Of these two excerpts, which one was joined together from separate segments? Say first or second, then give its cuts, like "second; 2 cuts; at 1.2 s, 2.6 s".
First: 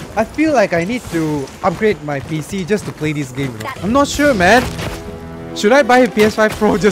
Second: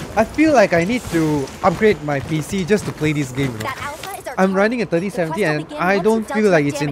first; 1 cut; at 3.7 s